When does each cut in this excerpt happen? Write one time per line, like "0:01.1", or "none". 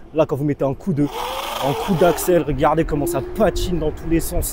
none